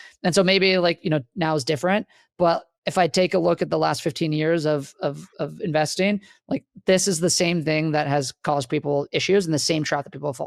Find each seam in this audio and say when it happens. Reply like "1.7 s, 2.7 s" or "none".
none